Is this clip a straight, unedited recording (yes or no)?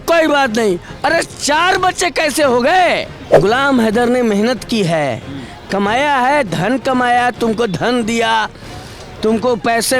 no